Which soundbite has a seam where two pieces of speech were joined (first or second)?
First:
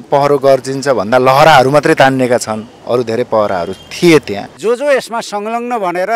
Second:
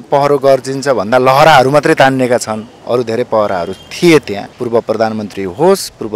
first